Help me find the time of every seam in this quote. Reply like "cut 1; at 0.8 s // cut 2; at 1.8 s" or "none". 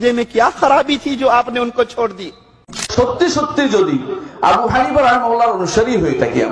cut 1; at 2.9 s